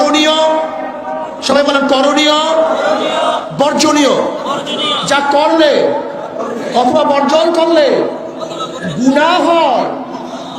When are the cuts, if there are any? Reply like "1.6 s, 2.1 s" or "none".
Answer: none